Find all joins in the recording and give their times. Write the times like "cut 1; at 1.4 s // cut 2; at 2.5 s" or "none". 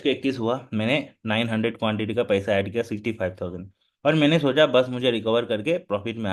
none